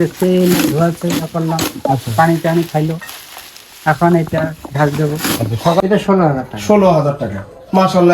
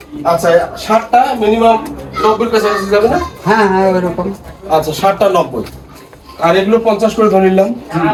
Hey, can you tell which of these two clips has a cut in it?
first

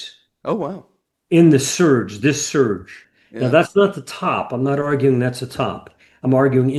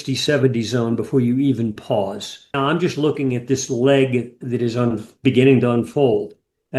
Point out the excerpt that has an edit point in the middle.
second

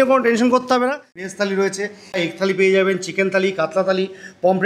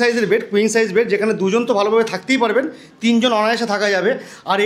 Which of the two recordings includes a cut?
first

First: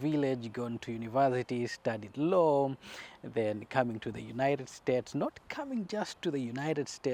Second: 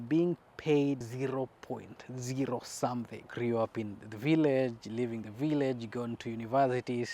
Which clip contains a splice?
second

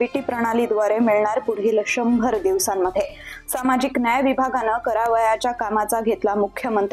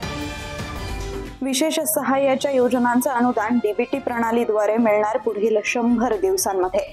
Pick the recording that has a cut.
second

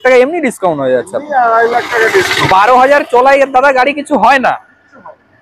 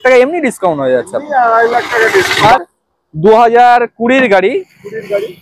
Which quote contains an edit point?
second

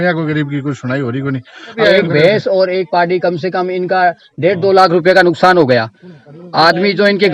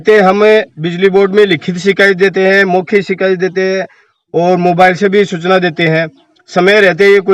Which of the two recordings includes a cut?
first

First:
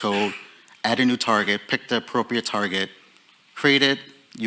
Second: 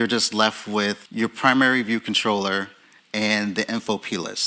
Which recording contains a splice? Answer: second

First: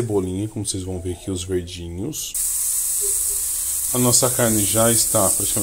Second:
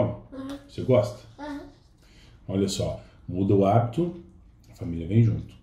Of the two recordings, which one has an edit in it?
first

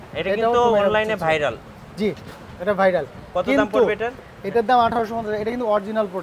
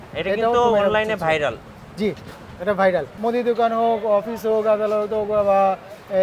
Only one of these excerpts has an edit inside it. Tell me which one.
second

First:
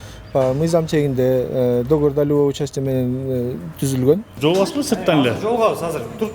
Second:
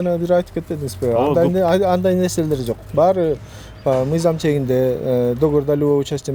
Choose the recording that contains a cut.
first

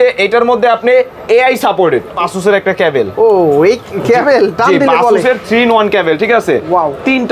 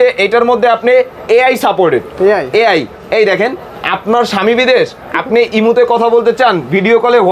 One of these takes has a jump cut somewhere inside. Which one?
first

